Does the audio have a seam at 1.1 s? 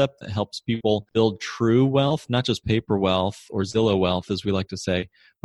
yes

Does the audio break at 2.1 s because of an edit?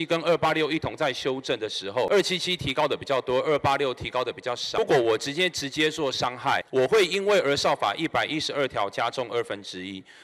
yes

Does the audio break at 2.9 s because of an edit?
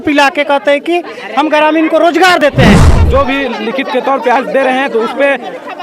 yes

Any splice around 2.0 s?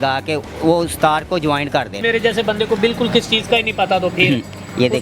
yes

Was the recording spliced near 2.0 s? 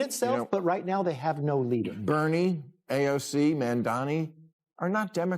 yes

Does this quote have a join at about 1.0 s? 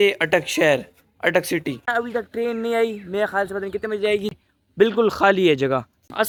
no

